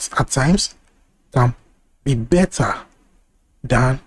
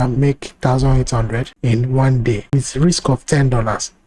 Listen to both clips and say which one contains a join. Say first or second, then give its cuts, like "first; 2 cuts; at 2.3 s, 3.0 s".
second; 2 cuts; at 1.5 s, 2.5 s